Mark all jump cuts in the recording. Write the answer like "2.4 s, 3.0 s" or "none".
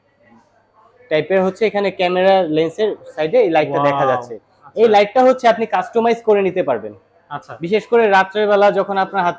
none